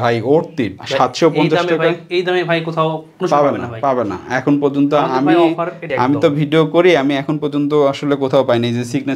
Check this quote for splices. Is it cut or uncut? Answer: uncut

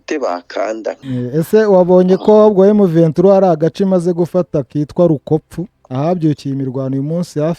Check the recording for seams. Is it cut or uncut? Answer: cut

